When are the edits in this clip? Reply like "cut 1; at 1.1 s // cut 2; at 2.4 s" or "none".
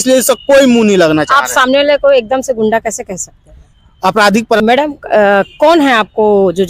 cut 1; at 4.6 s